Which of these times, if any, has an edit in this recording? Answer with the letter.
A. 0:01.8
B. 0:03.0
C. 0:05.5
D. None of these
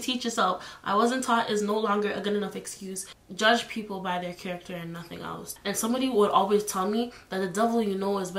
B